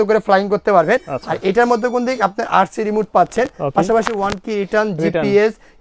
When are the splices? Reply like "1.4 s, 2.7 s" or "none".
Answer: none